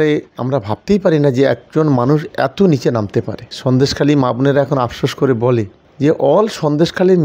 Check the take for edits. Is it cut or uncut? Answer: cut